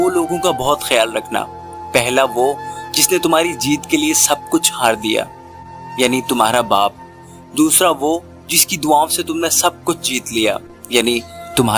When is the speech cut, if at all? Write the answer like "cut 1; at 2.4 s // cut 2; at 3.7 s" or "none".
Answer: none